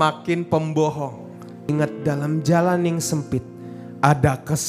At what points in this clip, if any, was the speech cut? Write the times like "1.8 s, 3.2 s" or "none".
1.7 s